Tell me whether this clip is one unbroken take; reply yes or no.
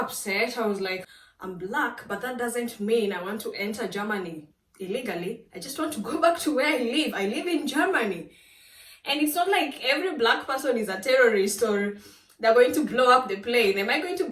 no